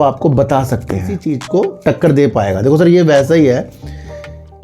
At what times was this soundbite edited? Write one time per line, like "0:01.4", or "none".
0:01.3